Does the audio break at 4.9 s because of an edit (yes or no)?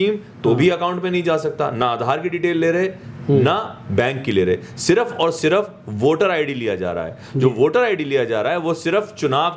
no